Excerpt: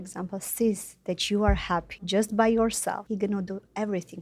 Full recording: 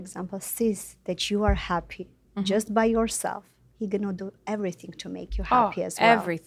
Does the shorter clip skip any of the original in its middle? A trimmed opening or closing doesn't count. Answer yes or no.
yes